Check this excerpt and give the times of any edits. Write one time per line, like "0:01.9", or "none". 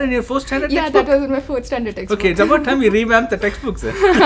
none